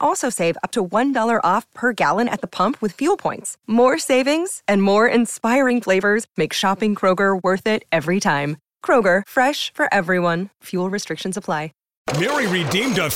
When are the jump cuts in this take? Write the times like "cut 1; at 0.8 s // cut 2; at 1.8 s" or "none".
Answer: cut 1; at 11.8 s